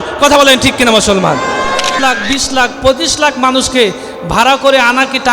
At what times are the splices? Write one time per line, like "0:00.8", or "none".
0:02.0